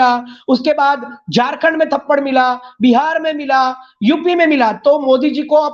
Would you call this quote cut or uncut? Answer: uncut